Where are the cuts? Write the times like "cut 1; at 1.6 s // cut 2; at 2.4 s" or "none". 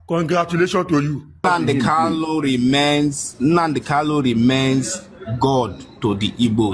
cut 1; at 1.4 s

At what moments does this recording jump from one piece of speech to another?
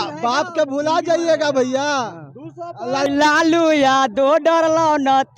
cut 1; at 3.1 s

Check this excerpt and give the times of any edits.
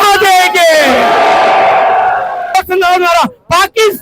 cut 1; at 2.5 s

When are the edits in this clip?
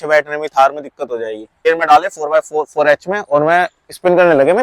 cut 1; at 1.6 s

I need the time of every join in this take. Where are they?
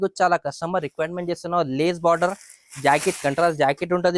none

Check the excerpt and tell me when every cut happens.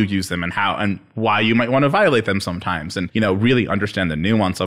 cut 1; at 3.0 s

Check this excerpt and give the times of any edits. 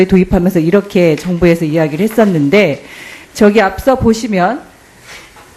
cut 1; at 2.7 s

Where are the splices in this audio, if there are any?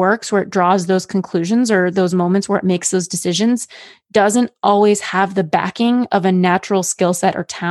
none

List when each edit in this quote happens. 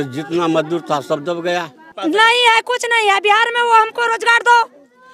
cut 1; at 1.8 s

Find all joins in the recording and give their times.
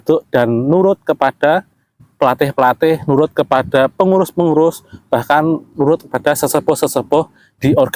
none

